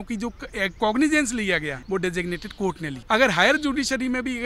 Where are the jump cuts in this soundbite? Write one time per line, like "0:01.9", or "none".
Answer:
0:01.8
0:03.0